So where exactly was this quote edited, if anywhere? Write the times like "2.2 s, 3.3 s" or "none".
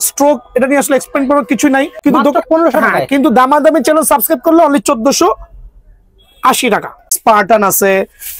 1.9 s, 7.0 s